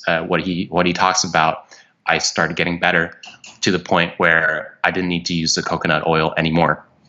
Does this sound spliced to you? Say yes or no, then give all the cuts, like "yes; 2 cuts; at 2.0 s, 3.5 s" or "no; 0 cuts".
no; 0 cuts